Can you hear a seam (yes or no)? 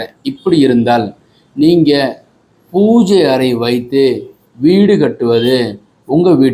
no